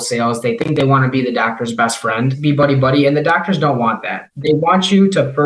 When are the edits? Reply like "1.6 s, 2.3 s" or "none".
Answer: 2.4 s, 4.3 s